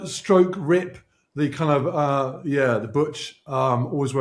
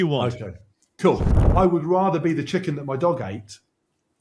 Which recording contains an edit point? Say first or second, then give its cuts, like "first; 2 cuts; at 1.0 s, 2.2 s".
second; 1 cut; at 1.4 s